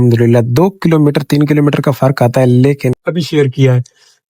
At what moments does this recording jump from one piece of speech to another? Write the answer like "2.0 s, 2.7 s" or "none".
3.0 s

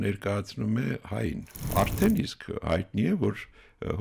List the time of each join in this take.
1.5 s

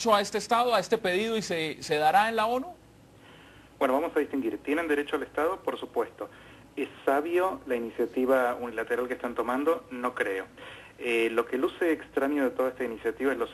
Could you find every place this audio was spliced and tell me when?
6.7 s

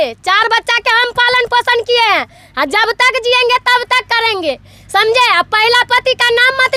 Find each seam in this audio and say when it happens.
none

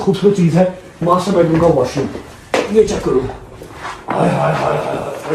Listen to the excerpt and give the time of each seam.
none

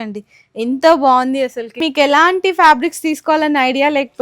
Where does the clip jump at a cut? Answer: 1.8 s

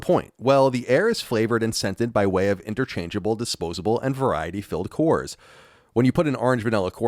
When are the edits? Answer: none

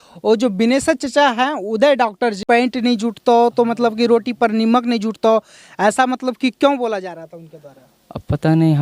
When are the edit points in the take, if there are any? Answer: 2.4 s

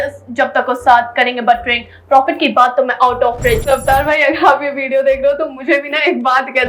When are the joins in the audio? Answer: 3.6 s

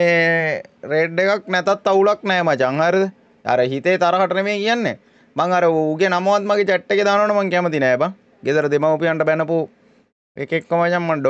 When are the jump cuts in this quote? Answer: none

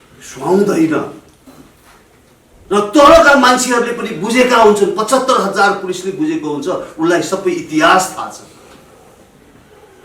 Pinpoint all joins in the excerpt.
none

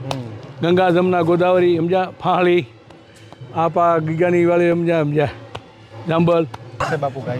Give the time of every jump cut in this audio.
none

